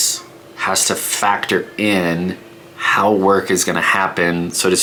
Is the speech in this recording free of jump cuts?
yes; 0 cuts

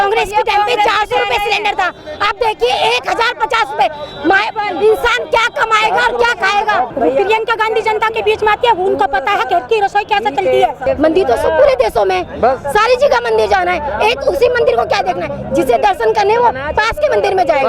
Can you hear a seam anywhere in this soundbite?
yes; 2 cuts; at 6.9 s, 10.8 s

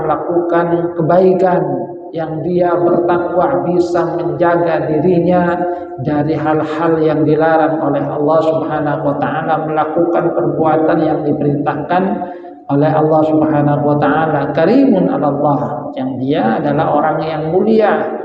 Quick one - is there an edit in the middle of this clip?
no; 0 cuts

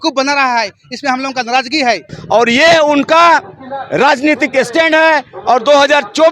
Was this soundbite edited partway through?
yes; 1 cut; at 2.1 s

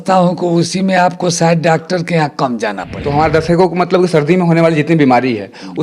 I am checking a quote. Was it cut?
yes; 1 cut; at 3.0 s

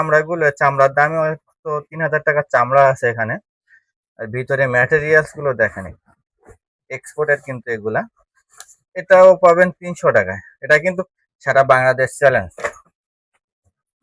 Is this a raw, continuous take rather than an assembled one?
no; 1 cut; at 11.1 s

